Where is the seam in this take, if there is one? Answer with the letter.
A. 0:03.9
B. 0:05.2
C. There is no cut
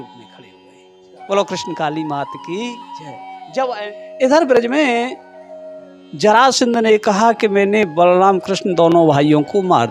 A